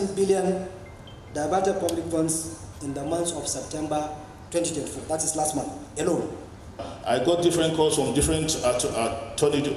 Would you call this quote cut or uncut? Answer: cut